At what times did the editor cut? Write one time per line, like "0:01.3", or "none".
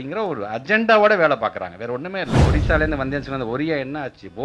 0:02.5

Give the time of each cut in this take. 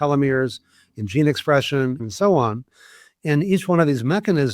0:02.0

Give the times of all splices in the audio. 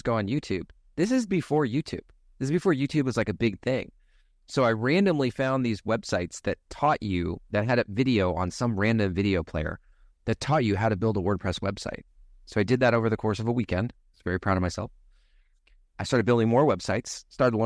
none

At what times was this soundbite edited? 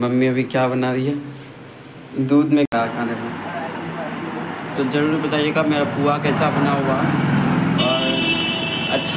0:02.7

